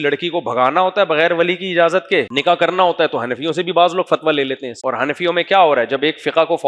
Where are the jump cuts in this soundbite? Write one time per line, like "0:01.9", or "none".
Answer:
0:02.3
0:04.7